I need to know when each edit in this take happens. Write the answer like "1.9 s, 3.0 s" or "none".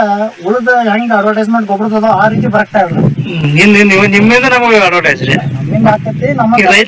none